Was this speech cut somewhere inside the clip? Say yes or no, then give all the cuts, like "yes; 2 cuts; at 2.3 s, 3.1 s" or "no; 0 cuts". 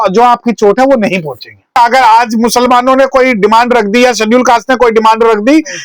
yes; 1 cut; at 1.8 s